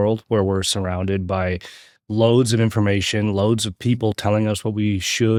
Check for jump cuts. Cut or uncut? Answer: uncut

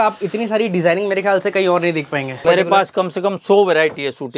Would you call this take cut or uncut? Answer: cut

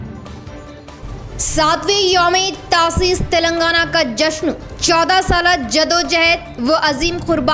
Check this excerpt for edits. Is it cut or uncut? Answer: cut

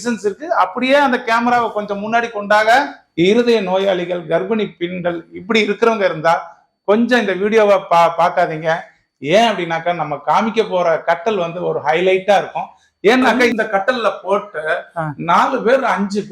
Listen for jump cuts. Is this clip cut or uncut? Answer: cut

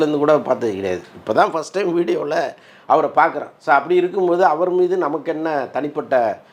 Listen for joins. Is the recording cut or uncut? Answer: uncut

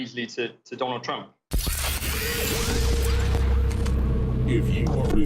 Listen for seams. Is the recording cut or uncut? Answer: cut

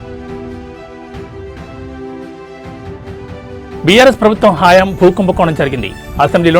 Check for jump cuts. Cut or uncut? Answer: uncut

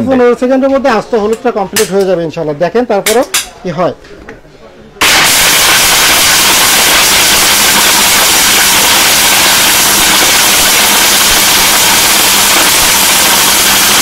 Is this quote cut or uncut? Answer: uncut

